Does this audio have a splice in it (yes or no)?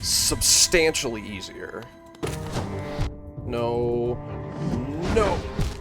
yes